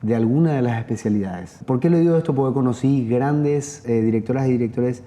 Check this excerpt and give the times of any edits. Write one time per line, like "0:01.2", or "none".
0:01.5
0:03.8